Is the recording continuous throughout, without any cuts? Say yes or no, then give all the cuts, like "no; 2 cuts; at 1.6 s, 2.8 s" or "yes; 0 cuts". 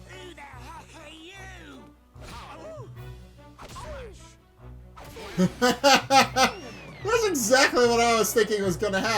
no; 1 cut; at 5.4 s